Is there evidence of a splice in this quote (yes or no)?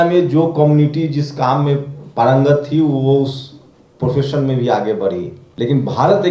yes